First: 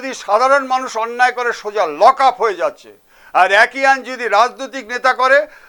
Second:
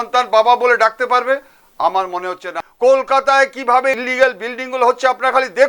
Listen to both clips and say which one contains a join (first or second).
second